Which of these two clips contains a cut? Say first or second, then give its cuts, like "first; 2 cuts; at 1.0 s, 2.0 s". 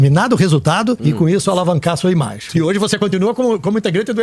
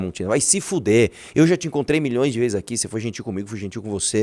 first; 2 cuts; at 1.0 s, 2.4 s